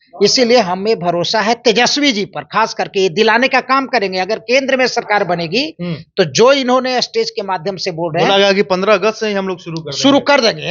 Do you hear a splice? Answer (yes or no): no